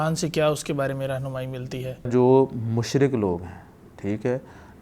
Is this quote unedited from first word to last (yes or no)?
no